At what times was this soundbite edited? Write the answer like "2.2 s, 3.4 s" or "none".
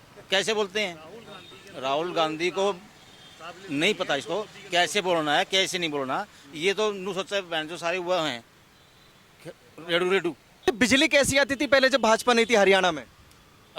10.6 s